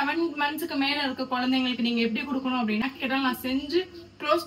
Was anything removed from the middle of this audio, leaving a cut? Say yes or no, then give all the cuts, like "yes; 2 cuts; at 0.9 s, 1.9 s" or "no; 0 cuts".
yes; 1 cut; at 2.8 s